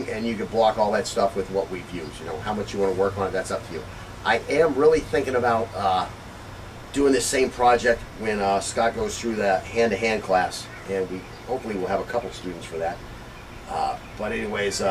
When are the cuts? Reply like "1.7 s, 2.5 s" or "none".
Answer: 10.5 s

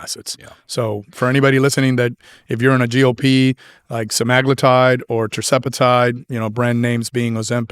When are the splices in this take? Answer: none

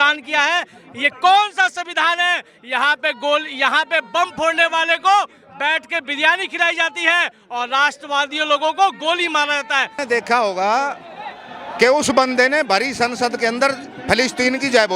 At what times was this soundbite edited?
10.0 s

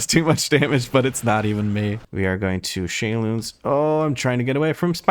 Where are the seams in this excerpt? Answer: 2.0 s

